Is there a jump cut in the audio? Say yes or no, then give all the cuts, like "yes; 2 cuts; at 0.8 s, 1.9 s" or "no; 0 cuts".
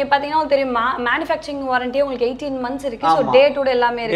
no; 0 cuts